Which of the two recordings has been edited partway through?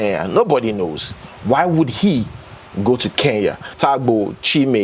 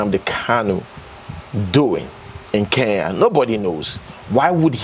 first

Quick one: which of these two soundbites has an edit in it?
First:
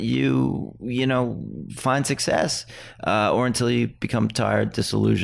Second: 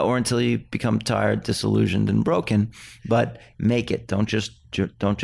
second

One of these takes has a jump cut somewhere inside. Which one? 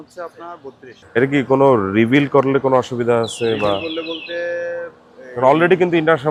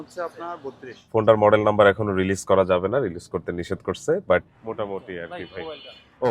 second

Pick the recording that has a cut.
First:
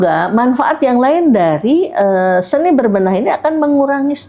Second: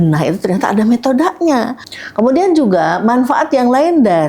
second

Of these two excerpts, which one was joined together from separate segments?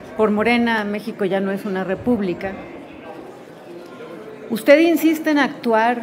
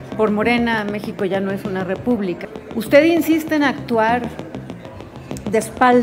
second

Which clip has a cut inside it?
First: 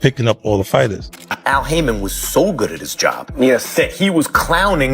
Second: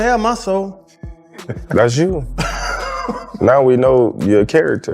first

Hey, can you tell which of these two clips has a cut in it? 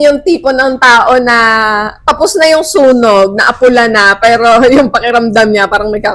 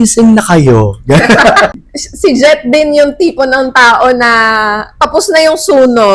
second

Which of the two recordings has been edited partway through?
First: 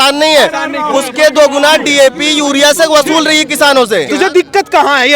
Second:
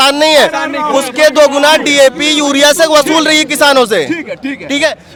first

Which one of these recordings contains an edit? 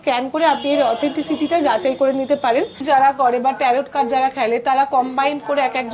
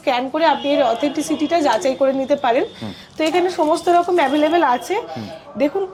first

